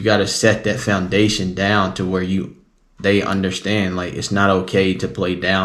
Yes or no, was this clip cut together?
no